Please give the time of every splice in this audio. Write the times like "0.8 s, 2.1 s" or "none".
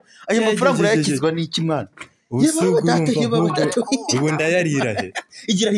none